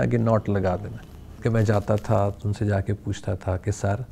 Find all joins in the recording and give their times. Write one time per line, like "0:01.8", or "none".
0:01.4